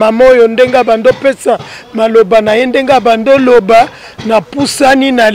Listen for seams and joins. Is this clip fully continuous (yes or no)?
yes